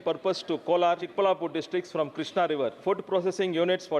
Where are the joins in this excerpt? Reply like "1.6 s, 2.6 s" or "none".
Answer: 1.1 s, 2.8 s